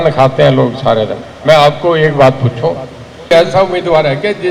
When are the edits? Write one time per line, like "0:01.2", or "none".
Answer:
0:03.3